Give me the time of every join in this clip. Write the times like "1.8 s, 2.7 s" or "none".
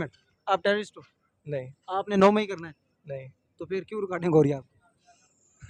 none

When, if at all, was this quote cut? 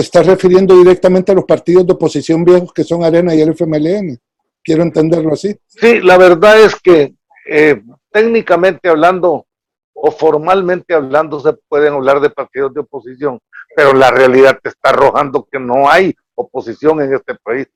none

